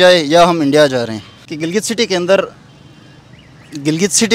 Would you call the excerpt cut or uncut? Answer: cut